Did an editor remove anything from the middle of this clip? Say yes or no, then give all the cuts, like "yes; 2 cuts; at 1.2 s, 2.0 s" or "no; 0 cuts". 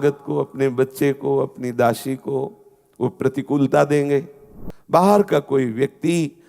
yes; 1 cut; at 4.4 s